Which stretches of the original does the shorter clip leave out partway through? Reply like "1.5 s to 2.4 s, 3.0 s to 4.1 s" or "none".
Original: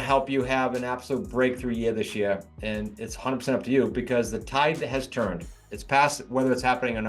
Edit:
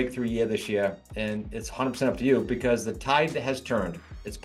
none